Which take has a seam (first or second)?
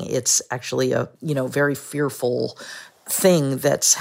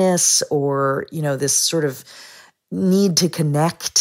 first